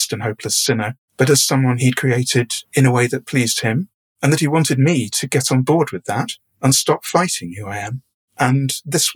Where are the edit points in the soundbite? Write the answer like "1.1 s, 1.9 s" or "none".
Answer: 1.0 s, 2.6 s